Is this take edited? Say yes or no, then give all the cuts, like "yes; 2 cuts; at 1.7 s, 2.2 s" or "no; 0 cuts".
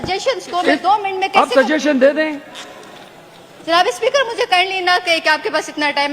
no; 0 cuts